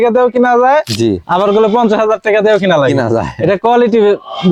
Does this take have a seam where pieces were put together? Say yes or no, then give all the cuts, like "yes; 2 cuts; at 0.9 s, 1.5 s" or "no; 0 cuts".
no; 0 cuts